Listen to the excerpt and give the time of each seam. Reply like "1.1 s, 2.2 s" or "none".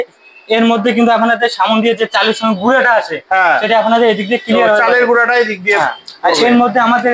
none